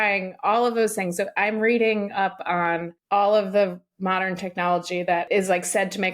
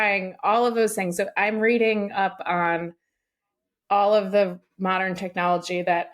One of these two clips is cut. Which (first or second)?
first